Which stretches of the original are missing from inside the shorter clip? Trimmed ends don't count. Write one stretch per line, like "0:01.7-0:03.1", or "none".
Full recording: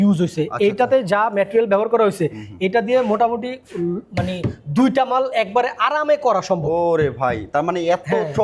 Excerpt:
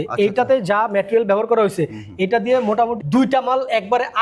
0:03.4-0:04.6